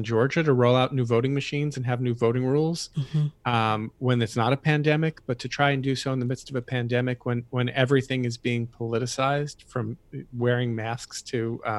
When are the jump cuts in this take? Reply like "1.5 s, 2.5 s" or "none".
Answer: none